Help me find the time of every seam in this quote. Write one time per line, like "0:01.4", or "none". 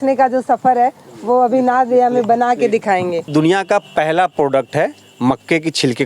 0:03.3